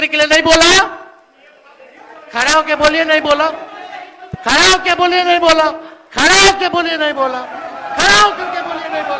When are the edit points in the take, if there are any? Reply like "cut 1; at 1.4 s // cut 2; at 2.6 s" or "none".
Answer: none